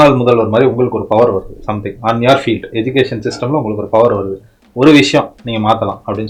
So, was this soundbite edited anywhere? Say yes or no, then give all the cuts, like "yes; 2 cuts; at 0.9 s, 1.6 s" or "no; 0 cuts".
no; 0 cuts